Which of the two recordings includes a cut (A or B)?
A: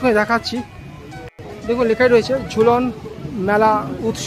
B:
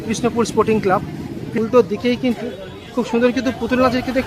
B